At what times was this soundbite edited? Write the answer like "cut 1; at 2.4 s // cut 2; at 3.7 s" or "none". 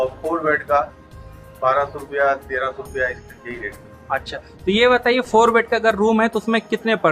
none